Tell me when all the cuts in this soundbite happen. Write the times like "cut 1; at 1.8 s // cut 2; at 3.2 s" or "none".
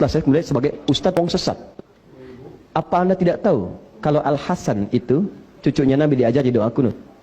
cut 1; at 1.2 s